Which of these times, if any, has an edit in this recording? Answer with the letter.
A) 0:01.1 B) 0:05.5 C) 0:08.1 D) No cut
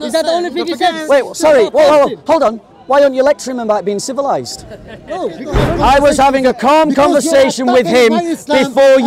B